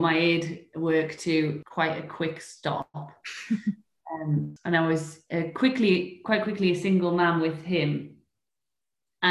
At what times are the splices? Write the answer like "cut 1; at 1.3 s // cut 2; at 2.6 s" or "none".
cut 1; at 1.6 s // cut 2; at 4.5 s